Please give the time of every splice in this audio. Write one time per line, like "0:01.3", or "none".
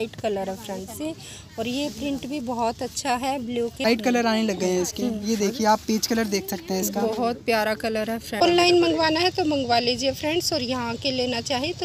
0:03.9
0:08.4